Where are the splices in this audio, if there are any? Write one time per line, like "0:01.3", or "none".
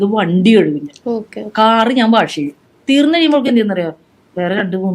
0:02.7